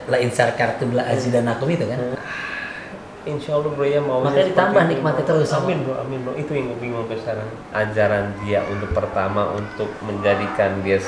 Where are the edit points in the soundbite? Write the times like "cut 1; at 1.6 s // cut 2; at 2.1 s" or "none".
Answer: cut 1; at 2.2 s // cut 2; at 7.7 s